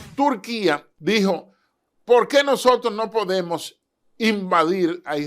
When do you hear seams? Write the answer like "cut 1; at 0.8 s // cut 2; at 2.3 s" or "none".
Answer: cut 1; at 0.9 s